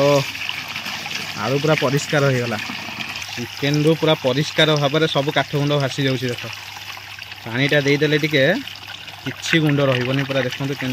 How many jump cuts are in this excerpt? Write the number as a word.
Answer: zero